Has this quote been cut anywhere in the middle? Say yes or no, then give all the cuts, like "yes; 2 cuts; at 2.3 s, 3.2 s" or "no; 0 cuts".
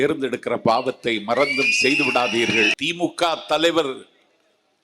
yes; 1 cut; at 2.7 s